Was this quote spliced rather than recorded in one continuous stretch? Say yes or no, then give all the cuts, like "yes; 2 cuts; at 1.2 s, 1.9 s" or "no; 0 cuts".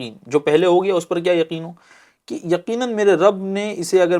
no; 0 cuts